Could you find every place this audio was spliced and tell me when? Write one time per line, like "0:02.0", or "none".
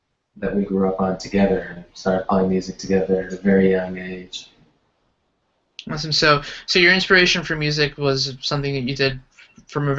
none

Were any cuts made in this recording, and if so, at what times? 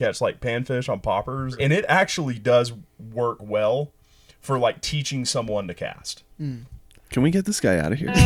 0:01.6

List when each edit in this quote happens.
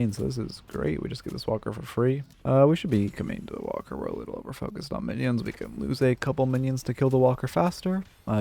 0:02.3

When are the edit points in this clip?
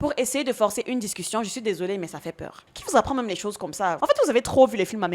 0:02.7

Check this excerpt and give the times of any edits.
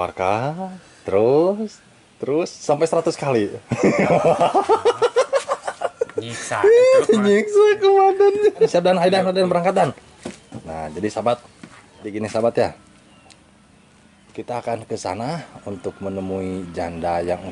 0:08.7
0:12.1

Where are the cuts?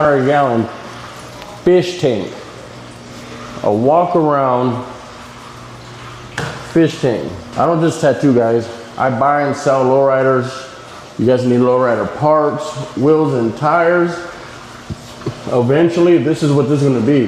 0:07.4

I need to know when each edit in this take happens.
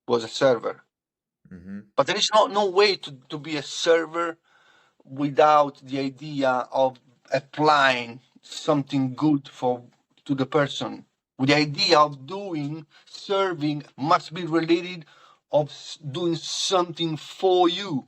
0:07.3
0:13.9

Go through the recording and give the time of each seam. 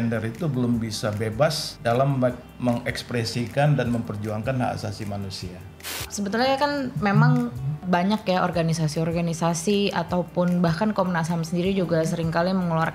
0:01.7
0:06.0
0:07.8

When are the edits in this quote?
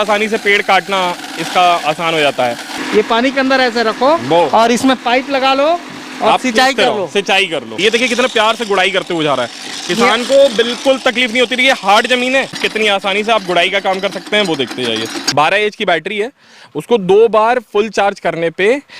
0:02.8
0:07.7
0:12.6
0:15.1

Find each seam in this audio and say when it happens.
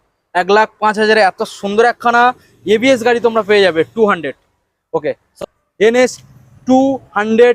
0:05.3

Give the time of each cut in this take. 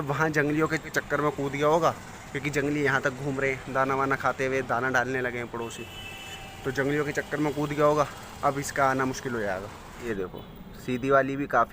0:01.0
0:10.0

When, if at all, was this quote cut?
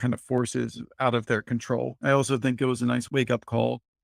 0:03.1

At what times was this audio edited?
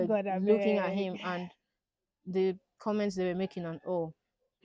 none

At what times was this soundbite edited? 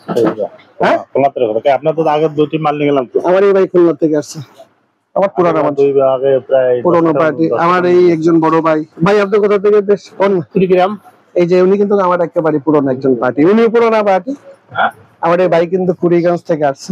none

